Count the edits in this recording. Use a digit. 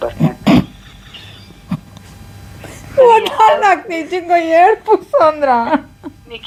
0